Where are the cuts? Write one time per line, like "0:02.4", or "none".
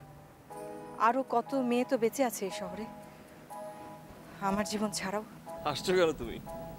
0:05.5